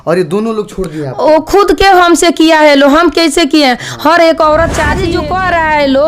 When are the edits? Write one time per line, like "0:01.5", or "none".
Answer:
0:04.9